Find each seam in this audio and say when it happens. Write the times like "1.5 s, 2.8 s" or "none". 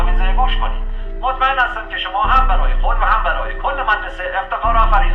none